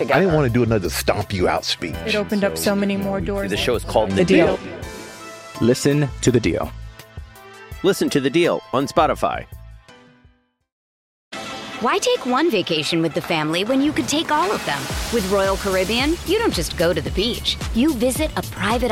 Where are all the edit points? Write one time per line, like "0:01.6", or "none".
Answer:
0:11.1